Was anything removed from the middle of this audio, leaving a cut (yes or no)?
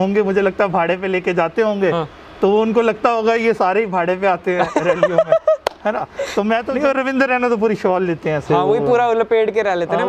yes